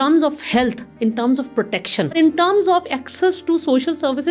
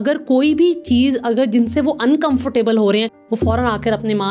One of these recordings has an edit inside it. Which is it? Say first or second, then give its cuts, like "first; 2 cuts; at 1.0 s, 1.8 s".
first; 1 cut; at 2.1 s